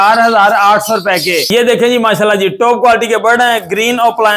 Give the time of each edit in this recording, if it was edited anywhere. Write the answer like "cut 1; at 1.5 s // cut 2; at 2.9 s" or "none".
cut 1; at 1.4 s

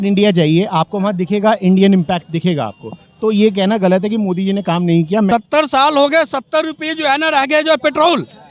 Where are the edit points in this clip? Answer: cut 1; at 5.3 s

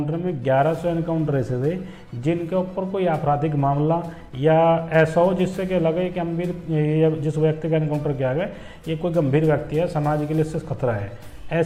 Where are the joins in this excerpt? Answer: none

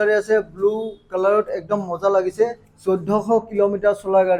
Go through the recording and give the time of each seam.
none

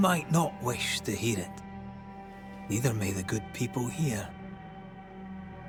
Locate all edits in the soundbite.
none

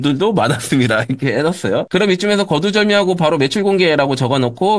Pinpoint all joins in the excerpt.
none

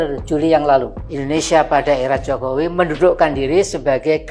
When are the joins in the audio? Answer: cut 1; at 1.0 s

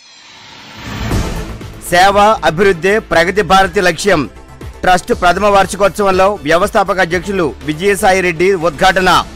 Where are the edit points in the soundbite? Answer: cut 1; at 1.5 s

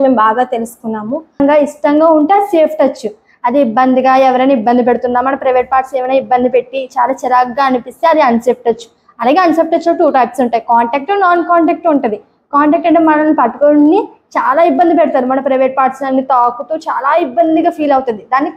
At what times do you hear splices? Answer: cut 1; at 1.4 s

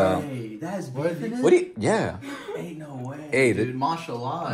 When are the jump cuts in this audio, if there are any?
none

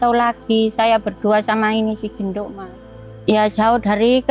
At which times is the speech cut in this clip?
cut 1; at 2.9 s

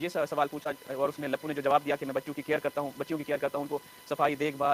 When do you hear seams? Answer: none

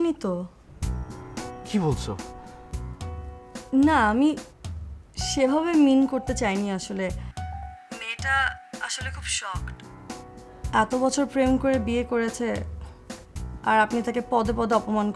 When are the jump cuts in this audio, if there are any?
none

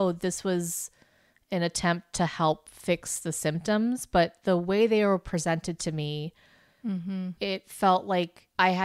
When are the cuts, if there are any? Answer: none

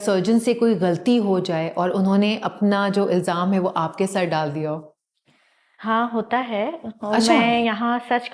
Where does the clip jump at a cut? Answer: none

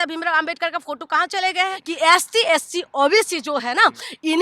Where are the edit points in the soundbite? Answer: cut 1; at 1.8 s

